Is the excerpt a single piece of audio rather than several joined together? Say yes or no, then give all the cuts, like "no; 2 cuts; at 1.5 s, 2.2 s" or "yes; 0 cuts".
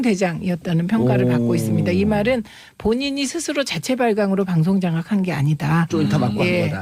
yes; 0 cuts